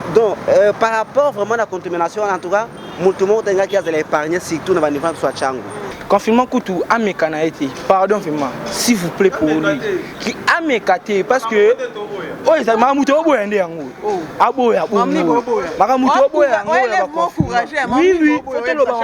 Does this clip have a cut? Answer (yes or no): yes